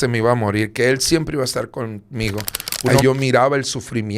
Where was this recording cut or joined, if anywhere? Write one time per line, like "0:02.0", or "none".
0:03.0